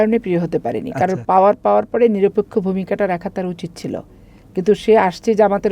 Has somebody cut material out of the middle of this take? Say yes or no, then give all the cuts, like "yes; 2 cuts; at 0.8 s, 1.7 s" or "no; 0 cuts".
yes; 1 cut; at 1.2 s